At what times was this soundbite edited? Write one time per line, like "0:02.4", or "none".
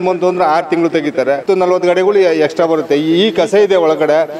0:01.4

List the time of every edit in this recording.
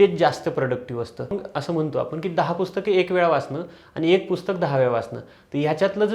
0:01.4

